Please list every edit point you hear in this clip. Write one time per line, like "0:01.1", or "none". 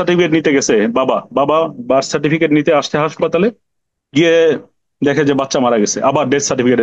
none